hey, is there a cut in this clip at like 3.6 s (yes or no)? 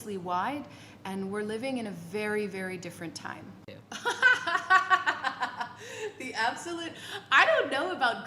yes